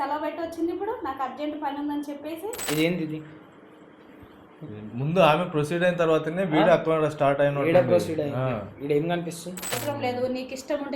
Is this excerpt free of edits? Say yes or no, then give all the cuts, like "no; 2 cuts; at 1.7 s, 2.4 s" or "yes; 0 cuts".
no; 2 cuts; at 2.6 s, 9.8 s